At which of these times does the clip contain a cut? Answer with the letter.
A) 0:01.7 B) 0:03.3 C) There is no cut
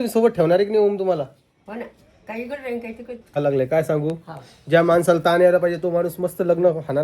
B